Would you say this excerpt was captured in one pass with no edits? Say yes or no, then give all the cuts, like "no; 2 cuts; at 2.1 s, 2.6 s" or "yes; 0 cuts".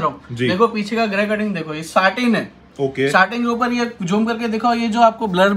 yes; 0 cuts